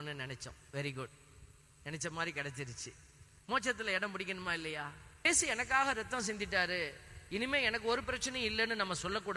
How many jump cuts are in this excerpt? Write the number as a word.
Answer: one